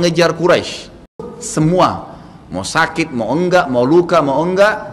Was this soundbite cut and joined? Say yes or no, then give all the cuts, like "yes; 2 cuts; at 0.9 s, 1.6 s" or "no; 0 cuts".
yes; 1 cut; at 1.3 s